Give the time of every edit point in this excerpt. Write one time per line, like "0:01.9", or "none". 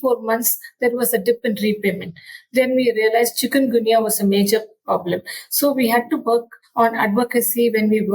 0:06.6